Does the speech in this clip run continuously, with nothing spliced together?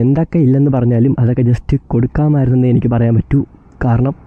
yes; 0 cuts

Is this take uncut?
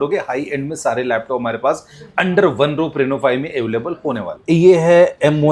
no; 1 cut; at 4.4 s

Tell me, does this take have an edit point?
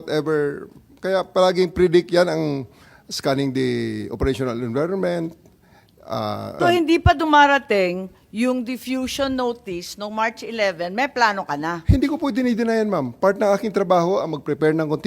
yes; 1 cut; at 6.6 s

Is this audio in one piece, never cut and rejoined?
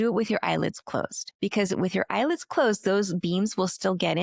no; 1 cut; at 1.2 s

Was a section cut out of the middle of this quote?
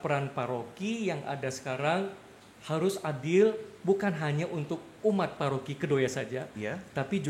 no; 0 cuts

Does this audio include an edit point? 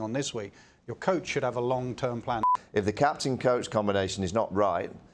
yes; 1 cut; at 2.4 s

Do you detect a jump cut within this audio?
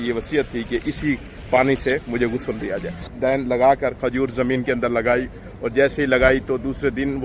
yes; 2 cuts; at 1.3 s, 2.9 s

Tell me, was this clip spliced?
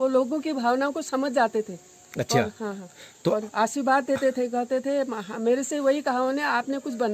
no; 0 cuts

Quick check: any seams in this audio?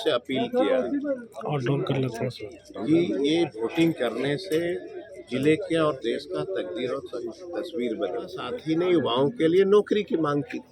yes; 1 cut; at 8.5 s

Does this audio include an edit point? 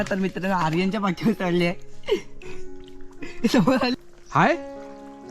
yes; 1 cut; at 3.9 s

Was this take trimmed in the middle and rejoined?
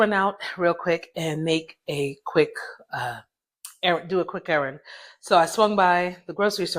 no; 0 cuts

